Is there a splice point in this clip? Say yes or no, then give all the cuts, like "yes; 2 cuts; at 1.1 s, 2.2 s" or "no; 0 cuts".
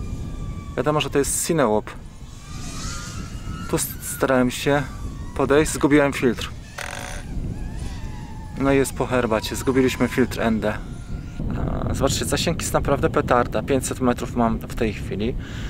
yes; 1 cut; at 11.4 s